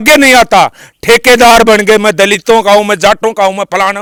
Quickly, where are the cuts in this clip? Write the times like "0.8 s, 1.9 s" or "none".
none